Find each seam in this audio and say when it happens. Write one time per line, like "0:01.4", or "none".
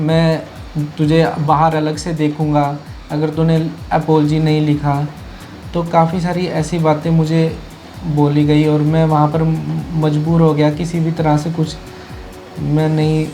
none